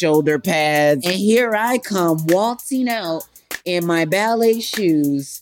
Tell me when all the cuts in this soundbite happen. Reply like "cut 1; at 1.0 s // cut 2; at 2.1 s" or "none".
cut 1; at 1.2 s